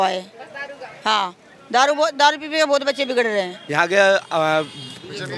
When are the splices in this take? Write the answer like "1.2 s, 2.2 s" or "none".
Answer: 3.6 s